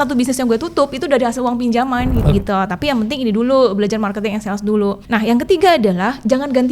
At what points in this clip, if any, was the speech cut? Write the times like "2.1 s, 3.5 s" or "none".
2.3 s, 5.0 s